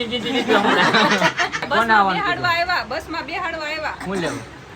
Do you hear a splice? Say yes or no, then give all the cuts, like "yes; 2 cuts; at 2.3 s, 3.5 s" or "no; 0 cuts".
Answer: yes; 1 cut; at 1.7 s